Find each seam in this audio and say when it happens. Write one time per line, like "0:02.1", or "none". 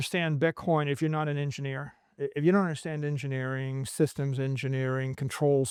none